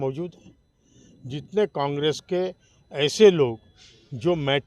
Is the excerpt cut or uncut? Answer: uncut